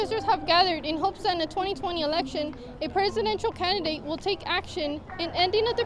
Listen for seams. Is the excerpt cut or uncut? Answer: uncut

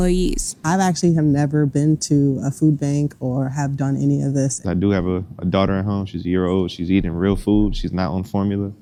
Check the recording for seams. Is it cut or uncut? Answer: uncut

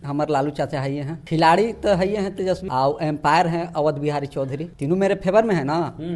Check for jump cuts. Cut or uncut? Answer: cut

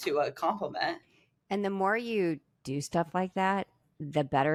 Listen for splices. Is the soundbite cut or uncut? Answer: uncut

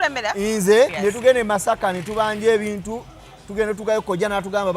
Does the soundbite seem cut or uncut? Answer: cut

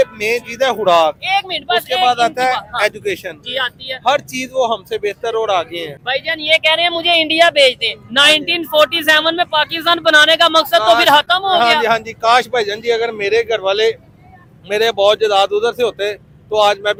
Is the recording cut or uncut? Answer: uncut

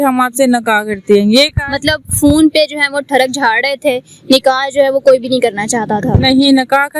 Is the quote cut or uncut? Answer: uncut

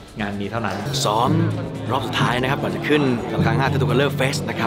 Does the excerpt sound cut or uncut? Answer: cut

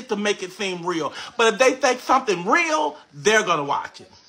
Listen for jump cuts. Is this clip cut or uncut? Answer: cut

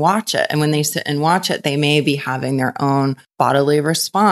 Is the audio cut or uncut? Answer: cut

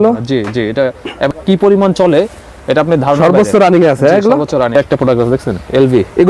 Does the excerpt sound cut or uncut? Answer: cut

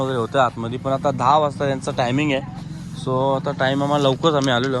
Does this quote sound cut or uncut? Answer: uncut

